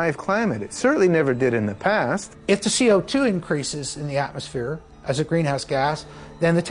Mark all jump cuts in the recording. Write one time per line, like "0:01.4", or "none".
0:02.3